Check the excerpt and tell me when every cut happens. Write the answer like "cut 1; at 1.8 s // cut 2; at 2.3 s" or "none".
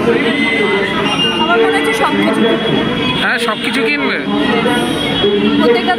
cut 1; at 3.6 s

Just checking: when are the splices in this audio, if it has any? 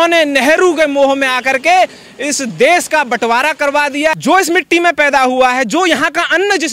cut 1; at 4.1 s

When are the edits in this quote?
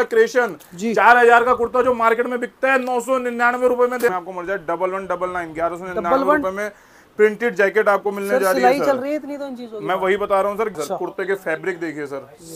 cut 1; at 4.1 s // cut 2; at 10.7 s

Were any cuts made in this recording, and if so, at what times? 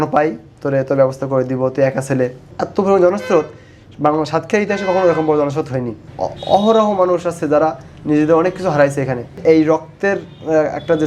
cut 1; at 2.5 s // cut 2; at 6.0 s // cut 3; at 9.4 s

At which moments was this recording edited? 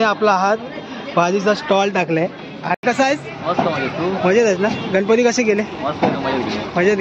cut 1; at 2.8 s

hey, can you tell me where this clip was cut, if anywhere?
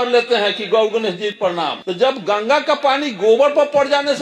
cut 1; at 1.5 s

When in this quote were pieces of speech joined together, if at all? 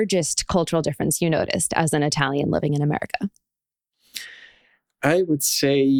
none

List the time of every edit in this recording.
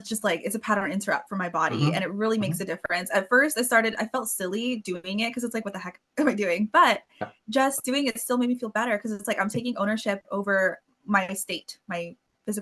none

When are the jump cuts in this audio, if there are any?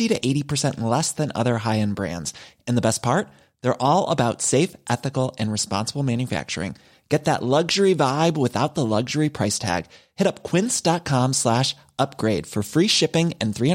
none

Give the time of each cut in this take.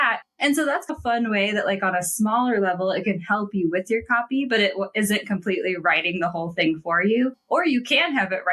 none

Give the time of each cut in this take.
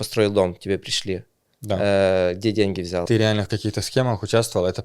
cut 1; at 3.0 s

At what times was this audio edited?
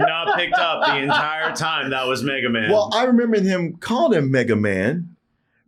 none

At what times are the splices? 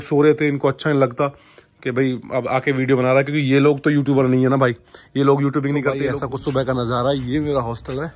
cut 1; at 6.0 s

